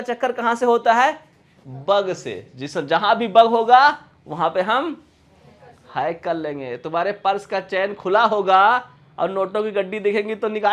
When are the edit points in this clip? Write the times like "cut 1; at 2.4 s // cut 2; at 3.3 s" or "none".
none